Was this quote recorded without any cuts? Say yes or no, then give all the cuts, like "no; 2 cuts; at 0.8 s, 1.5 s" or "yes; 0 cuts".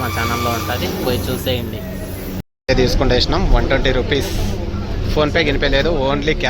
no; 1 cut; at 2.4 s